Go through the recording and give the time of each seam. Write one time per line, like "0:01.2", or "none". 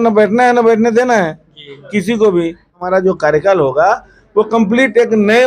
0:02.8